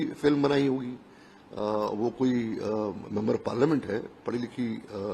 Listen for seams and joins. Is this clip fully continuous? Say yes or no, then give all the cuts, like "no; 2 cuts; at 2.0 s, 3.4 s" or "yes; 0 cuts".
yes; 0 cuts